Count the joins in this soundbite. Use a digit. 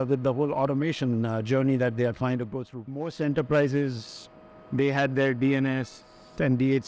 1